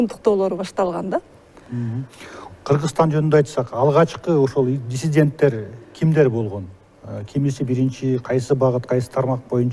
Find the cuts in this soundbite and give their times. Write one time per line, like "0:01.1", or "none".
none